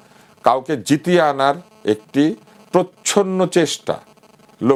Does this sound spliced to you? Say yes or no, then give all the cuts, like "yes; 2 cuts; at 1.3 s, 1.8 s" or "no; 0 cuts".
no; 0 cuts